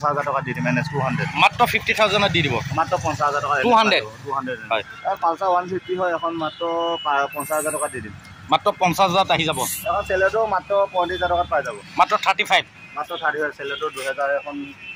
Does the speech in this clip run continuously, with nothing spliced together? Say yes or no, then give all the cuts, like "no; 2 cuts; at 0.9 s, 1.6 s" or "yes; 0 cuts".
no; 2 cuts; at 4.9 s, 9.7 s